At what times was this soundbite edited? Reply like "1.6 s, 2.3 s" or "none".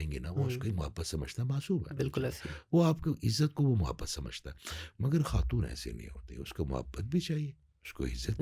none